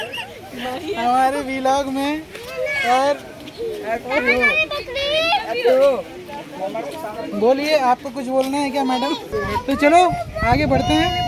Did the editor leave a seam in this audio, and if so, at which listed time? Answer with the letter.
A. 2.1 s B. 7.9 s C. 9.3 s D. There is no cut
C